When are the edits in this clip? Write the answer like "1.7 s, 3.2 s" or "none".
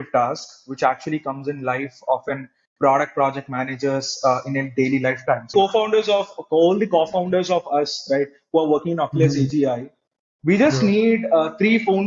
5.5 s